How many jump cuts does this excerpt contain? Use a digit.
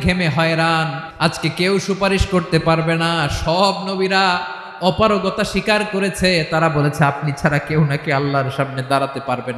1